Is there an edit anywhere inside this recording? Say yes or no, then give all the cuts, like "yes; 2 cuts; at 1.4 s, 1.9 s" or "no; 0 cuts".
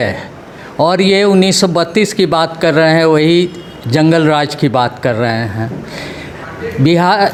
no; 0 cuts